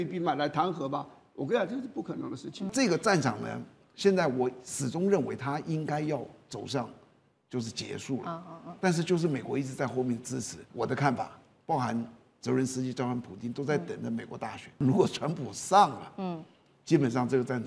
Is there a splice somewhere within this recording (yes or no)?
yes